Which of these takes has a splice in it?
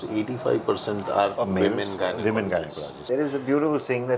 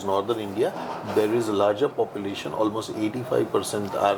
first; 1 cut; at 2.9 s

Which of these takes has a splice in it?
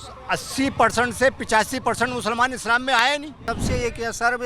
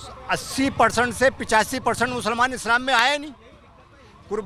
first; 1 cut; at 3.4 s

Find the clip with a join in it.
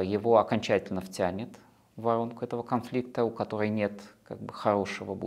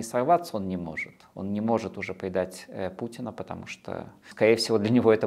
second; 1 cut; at 4.3 s

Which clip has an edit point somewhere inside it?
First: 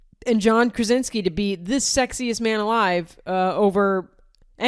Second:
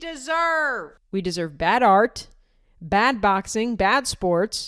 second; 1 cut; at 0.9 s

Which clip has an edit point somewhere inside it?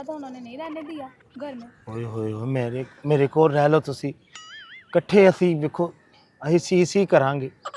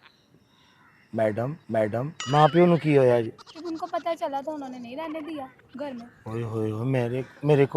second; 2 cuts; at 2.2 s, 3.5 s

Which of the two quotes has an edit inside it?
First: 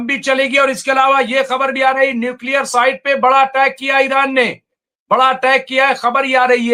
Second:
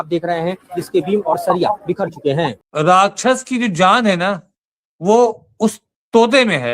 second; 1 cut; at 2.6 s

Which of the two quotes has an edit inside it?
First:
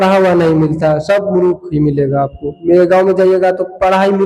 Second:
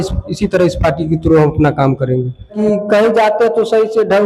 second; 1 cut; at 2.6 s

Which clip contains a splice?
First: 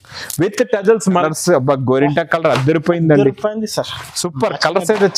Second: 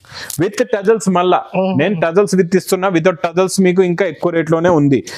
first; 1 cut; at 1.2 s

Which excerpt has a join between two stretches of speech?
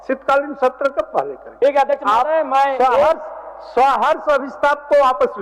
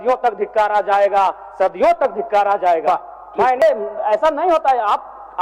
second; 1 cut; at 3.6 s

